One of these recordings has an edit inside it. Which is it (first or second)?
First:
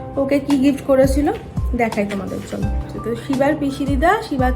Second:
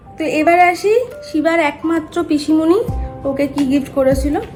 first